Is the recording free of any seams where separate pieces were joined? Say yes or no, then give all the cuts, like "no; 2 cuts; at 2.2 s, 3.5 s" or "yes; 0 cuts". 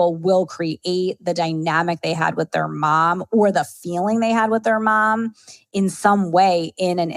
yes; 0 cuts